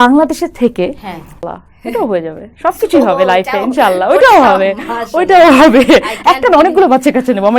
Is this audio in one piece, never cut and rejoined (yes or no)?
no